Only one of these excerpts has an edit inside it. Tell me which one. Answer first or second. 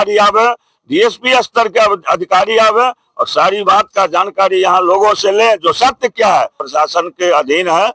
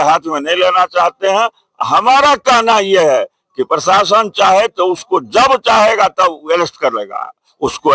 first